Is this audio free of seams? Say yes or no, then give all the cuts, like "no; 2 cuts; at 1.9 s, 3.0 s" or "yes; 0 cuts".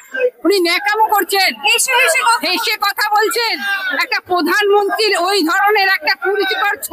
yes; 0 cuts